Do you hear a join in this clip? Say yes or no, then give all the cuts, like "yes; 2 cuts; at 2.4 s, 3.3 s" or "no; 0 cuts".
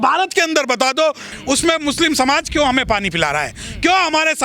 yes; 1 cut; at 1.3 s